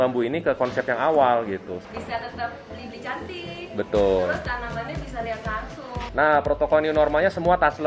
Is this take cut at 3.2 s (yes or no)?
no